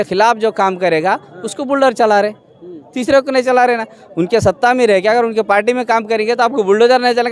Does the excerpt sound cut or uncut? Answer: uncut